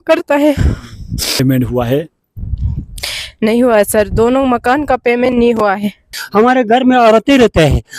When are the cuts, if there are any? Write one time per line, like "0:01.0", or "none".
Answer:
0:01.4
0:06.2